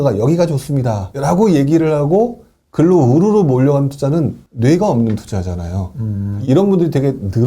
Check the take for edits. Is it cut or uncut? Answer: cut